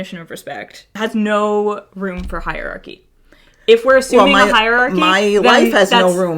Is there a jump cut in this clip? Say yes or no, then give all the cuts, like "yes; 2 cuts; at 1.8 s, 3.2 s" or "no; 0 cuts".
yes; 1 cut; at 1.0 s